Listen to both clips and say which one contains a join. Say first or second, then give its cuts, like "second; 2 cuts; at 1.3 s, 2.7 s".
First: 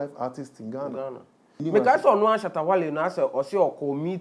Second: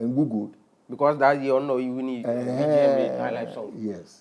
first; 1 cut; at 1.6 s